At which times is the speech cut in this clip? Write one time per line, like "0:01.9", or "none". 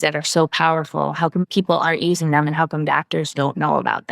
0:01.4